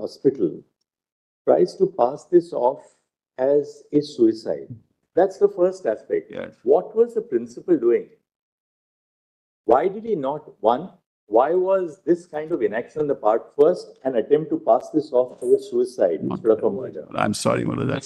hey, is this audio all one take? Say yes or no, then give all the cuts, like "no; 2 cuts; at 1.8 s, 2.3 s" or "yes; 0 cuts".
no; 1 cut; at 4.9 s